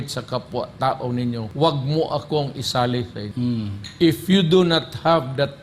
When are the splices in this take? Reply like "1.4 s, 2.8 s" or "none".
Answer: 1.5 s, 3.2 s